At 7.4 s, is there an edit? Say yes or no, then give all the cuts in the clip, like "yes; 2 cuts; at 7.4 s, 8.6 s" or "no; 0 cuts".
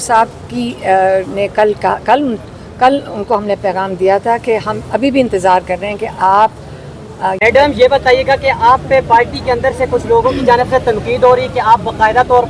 yes; 1 cut; at 7.4 s